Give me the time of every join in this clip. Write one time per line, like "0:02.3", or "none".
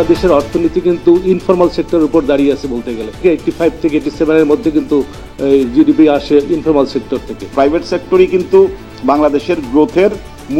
0:03.2
0:07.5